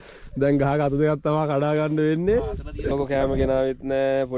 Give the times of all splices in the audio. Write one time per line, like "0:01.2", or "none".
0:02.9